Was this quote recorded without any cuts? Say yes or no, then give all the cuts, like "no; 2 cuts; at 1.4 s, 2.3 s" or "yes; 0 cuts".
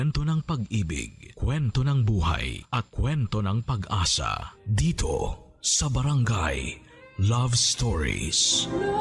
yes; 0 cuts